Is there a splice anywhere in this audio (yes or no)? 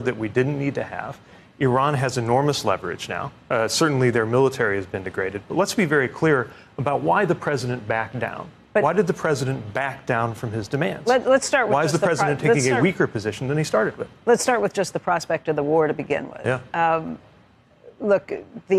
no